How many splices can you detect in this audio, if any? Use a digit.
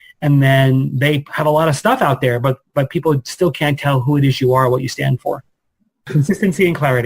1